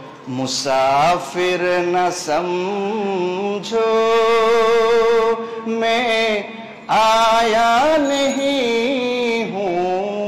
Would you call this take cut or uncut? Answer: uncut